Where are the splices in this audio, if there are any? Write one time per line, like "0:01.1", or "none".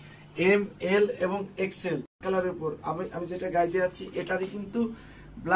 0:02.2